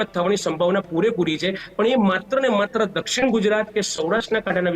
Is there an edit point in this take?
no; 0 cuts

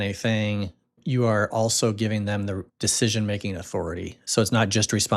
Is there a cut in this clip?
yes; 2 cuts; at 1.0 s, 2.7 s

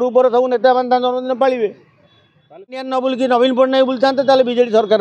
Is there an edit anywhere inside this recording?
yes; 1 cut; at 2.9 s

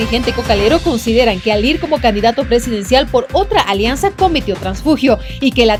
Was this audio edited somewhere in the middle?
no; 0 cuts

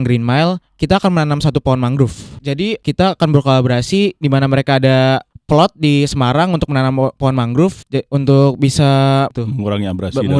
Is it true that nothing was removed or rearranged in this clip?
no; 3 cuts; at 2.6 s, 5.3 s, 7.8 s

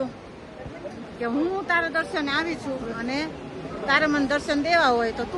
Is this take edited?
no; 0 cuts

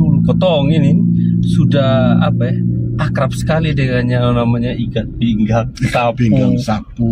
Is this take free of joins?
yes; 0 cuts

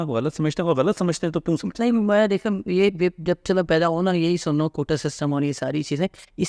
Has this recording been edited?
no; 0 cuts

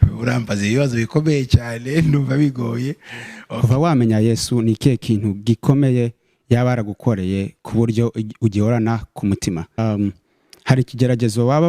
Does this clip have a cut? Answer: yes; 2 cuts; at 3.4 s, 9.8 s

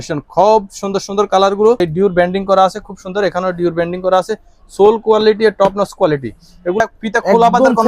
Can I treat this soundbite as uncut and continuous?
no; 2 cuts; at 1.8 s, 6.8 s

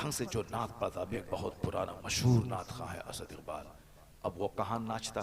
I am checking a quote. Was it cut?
yes; 1 cut; at 1.2 s

